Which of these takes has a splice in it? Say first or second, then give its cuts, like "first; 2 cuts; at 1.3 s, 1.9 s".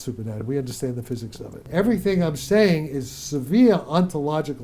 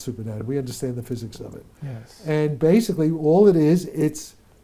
first; 1 cut; at 1.6 s